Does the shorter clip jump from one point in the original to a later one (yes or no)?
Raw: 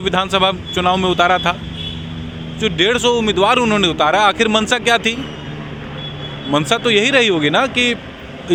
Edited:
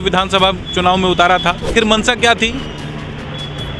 yes